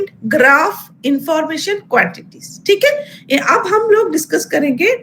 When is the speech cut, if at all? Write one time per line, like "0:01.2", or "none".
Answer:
none